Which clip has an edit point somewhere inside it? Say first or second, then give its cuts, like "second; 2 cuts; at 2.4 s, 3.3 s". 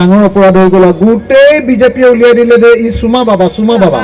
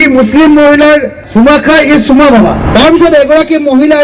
second; 2 cuts; at 1.2 s, 2.6 s